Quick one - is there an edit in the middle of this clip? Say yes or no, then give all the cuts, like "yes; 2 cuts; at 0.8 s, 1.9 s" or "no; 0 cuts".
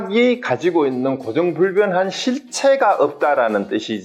no; 0 cuts